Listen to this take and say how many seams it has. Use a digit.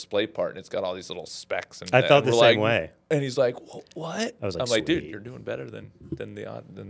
0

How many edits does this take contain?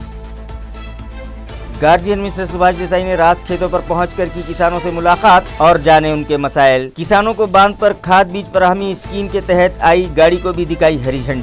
1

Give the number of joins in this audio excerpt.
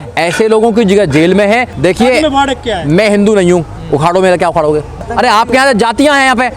2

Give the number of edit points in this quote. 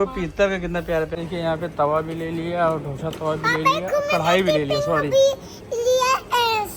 1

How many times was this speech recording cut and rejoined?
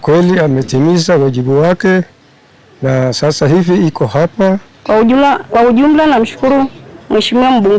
1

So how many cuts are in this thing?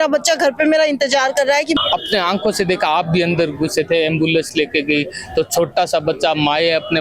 1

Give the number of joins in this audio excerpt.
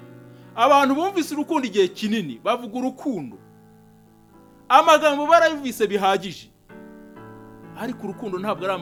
0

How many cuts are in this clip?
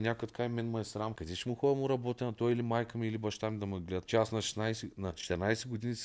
3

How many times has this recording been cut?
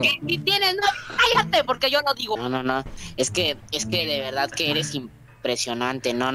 1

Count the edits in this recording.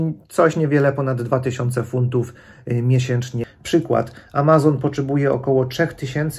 1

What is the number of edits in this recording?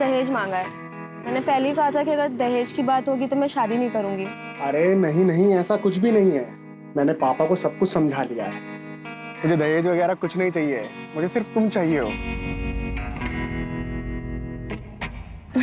0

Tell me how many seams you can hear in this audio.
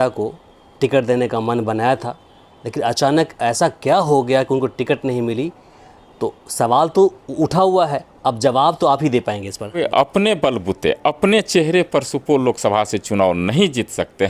1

